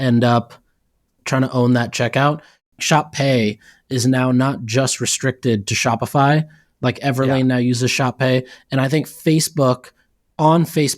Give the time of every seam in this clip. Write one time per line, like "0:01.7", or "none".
0:02.6